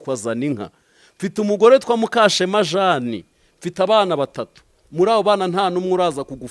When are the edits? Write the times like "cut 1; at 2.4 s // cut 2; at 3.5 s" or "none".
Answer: none

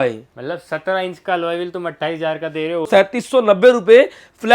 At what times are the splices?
cut 1; at 2.8 s

